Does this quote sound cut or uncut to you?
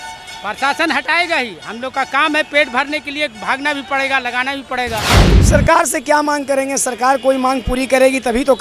cut